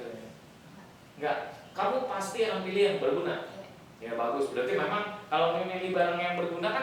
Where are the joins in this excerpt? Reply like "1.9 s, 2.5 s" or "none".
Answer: none